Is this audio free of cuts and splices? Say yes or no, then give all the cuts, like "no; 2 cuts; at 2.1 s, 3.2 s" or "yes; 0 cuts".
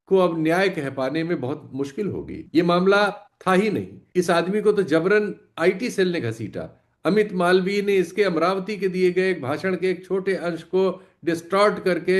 no; 2 cuts; at 2.4 s, 3.9 s